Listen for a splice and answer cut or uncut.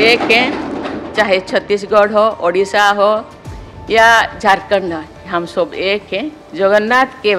cut